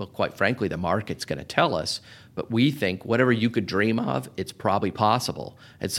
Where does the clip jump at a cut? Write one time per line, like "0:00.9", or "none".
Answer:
0:03.0
0:04.8